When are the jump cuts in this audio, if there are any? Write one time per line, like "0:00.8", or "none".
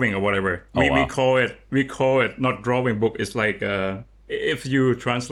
none